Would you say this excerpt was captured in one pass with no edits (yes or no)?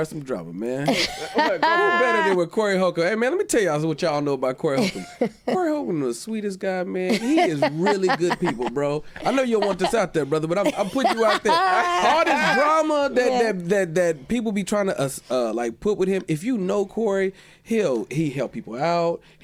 yes